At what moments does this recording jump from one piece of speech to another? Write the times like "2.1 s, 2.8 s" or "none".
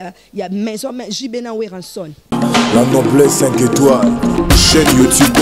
2.2 s